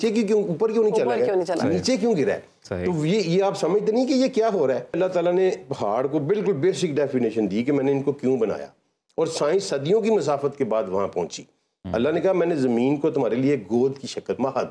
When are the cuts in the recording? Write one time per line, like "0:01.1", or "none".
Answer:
0:05.0